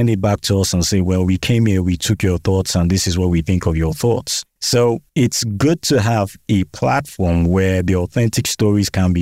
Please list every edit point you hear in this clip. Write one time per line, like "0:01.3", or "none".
0:04.5